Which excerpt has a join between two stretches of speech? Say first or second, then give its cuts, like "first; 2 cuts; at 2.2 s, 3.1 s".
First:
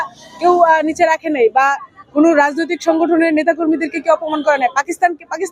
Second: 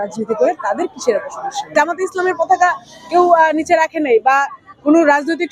second; 1 cut; at 1.7 s